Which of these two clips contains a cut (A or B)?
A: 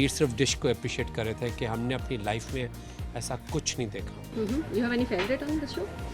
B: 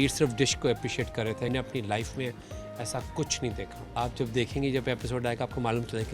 B